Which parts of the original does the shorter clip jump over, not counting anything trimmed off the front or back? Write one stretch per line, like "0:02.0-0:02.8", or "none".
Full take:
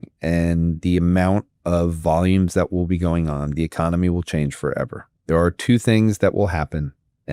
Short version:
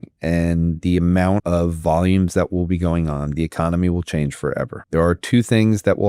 0:01.4-0:01.6
0:05.0-0:05.1